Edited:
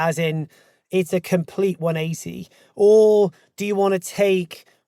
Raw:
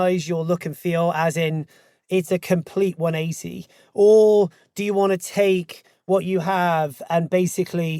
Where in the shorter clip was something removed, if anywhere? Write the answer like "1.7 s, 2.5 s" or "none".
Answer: none